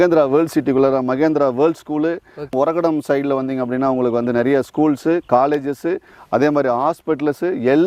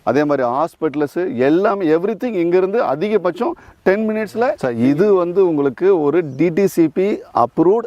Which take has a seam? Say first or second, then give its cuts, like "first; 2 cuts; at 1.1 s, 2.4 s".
second; 1 cut; at 4.6 s